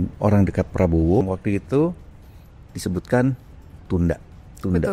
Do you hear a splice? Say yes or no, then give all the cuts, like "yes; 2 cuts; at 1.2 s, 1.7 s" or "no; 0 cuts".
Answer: yes; 1 cut; at 1.2 s